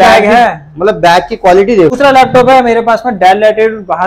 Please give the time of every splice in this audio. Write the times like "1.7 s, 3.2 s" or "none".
1.9 s